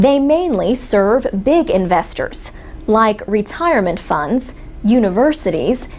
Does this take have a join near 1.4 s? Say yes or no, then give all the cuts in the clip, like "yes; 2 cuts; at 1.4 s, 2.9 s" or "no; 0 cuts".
yes; 1 cut; at 1.4 s